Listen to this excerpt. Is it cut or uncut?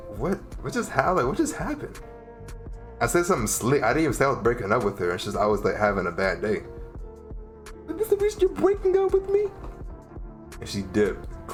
uncut